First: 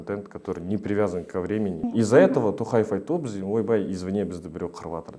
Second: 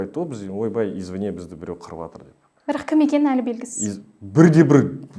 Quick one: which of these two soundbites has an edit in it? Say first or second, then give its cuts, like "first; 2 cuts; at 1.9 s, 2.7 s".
first; 1 cut; at 1.8 s